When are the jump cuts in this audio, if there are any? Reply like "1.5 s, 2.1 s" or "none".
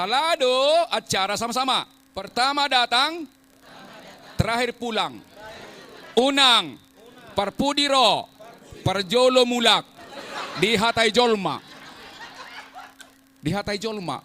2.3 s